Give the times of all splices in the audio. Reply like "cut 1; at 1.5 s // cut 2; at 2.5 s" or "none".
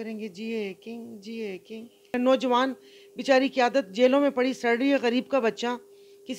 cut 1; at 2.1 s